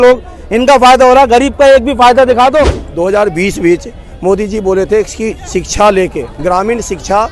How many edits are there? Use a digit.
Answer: 1